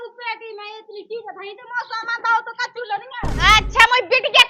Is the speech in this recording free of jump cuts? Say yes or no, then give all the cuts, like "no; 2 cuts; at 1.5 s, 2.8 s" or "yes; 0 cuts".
no; 1 cut; at 3.3 s